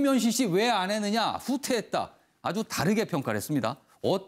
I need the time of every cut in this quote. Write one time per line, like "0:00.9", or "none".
none